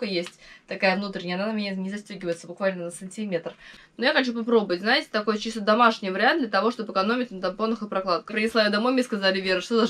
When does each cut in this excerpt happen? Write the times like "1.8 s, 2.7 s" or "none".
3.8 s, 8.3 s